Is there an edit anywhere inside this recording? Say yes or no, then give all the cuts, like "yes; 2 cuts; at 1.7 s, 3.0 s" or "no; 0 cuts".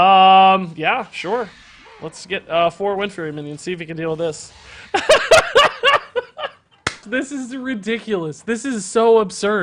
yes; 1 cut; at 7.0 s